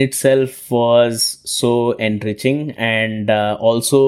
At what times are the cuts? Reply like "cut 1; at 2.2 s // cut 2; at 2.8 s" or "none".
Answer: none